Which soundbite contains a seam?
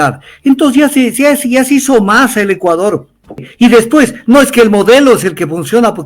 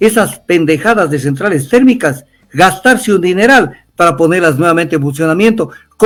first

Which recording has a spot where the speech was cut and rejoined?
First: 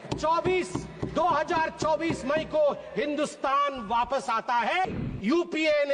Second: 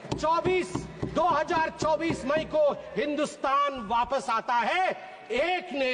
first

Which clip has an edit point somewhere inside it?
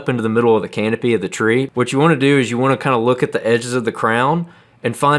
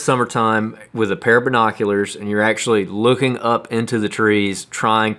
first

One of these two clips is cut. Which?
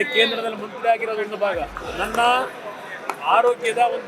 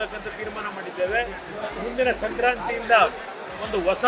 first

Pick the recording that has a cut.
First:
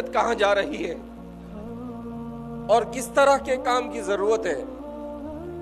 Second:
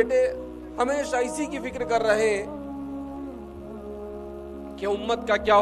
first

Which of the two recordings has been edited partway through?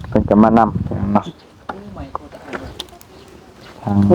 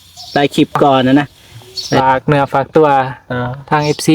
second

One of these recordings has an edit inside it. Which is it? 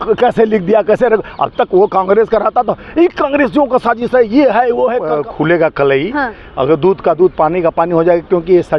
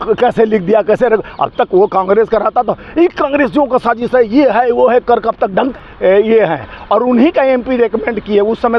first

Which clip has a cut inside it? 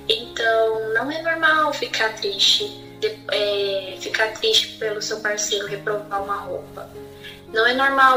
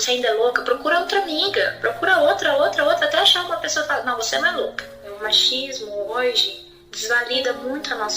second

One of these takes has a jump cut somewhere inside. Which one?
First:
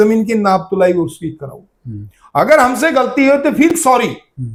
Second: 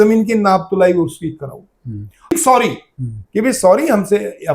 second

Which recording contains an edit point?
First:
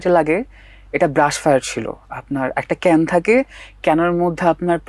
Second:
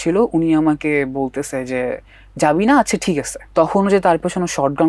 second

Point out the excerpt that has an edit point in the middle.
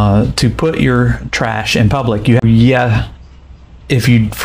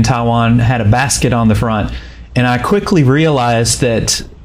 first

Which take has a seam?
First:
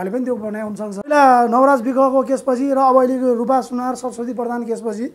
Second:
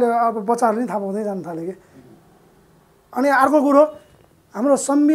first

